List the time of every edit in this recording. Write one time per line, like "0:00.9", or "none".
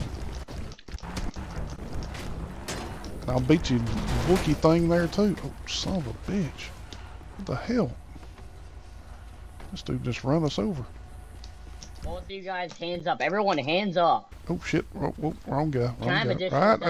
none